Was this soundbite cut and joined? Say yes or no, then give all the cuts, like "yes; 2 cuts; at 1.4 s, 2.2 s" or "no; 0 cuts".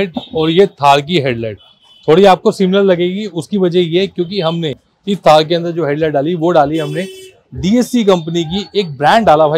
no; 0 cuts